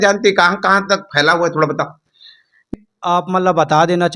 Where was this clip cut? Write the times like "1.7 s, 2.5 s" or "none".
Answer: 2.8 s

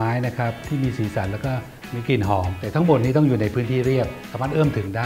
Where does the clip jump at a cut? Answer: none

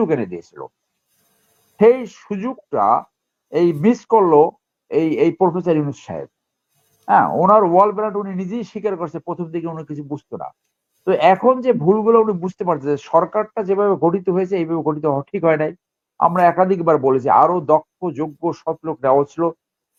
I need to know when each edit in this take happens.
none

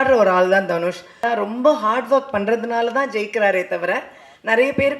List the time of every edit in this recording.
1.2 s

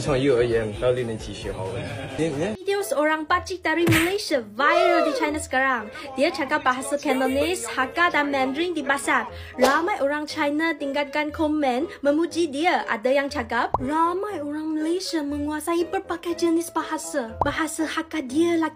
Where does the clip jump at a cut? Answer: 2.6 s

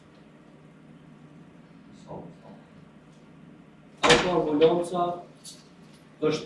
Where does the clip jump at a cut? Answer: 3.9 s

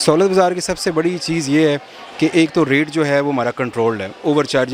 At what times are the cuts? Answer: none

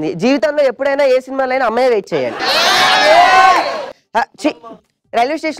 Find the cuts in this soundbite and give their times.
none

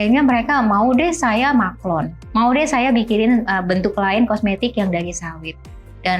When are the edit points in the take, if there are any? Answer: 2.2 s

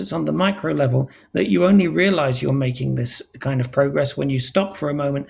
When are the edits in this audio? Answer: none

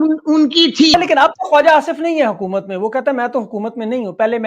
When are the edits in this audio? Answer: 0.9 s

